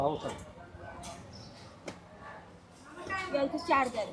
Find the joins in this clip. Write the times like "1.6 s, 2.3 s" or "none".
none